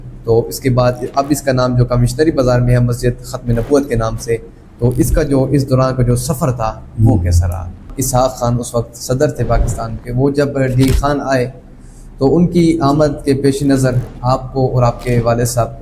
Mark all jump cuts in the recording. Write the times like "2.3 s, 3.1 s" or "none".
8.0 s